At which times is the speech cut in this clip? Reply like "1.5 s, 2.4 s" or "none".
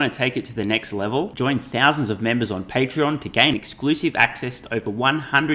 none

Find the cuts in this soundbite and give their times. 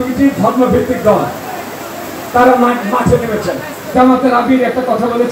3.9 s

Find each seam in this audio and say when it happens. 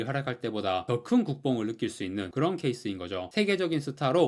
3.3 s

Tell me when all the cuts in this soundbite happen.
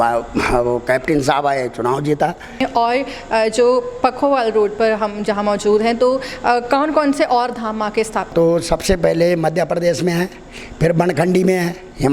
2.6 s, 8.3 s

